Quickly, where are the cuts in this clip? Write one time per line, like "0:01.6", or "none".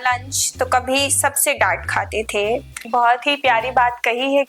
0:02.9